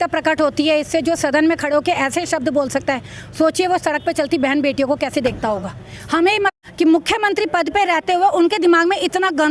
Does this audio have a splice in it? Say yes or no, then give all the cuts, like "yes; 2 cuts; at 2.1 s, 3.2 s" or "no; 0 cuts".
yes; 1 cut; at 6.5 s